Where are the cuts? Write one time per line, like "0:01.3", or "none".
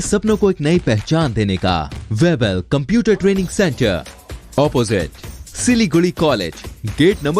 0:02.0